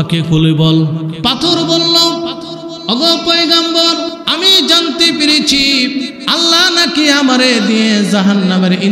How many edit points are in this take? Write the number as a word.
four